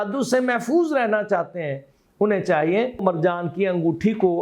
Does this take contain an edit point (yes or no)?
yes